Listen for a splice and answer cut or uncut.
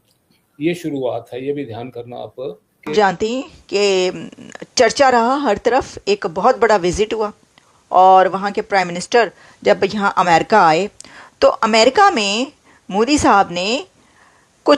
cut